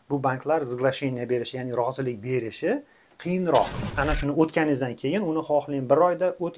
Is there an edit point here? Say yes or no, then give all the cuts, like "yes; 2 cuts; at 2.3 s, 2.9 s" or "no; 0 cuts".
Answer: yes; 1 cut; at 3.8 s